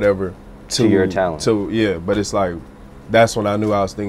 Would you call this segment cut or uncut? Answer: uncut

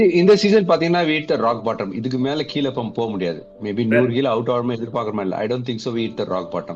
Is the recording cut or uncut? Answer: uncut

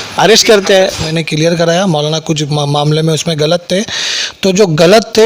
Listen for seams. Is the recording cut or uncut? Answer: cut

